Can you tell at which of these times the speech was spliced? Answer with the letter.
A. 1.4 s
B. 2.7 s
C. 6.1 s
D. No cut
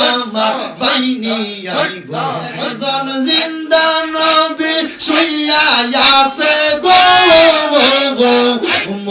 B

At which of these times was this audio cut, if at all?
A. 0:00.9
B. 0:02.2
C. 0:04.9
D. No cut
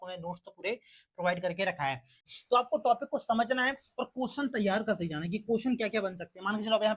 B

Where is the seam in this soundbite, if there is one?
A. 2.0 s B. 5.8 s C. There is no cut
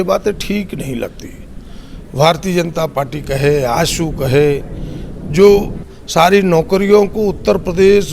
B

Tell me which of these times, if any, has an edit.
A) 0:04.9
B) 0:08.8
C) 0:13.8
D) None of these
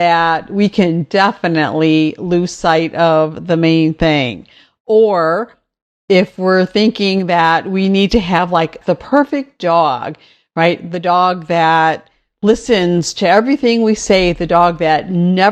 B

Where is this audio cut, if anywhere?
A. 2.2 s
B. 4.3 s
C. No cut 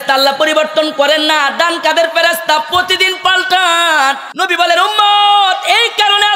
B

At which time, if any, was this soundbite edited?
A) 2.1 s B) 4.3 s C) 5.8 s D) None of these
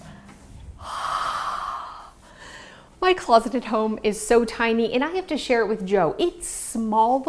D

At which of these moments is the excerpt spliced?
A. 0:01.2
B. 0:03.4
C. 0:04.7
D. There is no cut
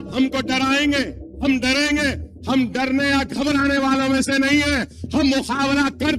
A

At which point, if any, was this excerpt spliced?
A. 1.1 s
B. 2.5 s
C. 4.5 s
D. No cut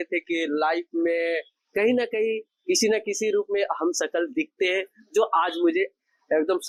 D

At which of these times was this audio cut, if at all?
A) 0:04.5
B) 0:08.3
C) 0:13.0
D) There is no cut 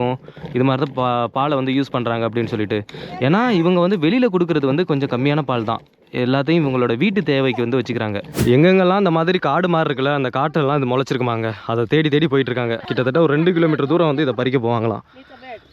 B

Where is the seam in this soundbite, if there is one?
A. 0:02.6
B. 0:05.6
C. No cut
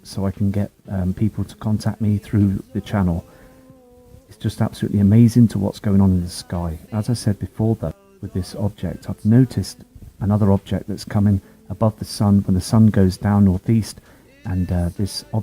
B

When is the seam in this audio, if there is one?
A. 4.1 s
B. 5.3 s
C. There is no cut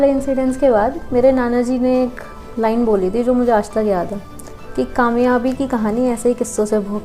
C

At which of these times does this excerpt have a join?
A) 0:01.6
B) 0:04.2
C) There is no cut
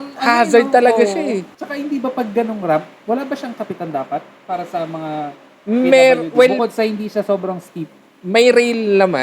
A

